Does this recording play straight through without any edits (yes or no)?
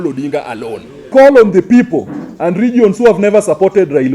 no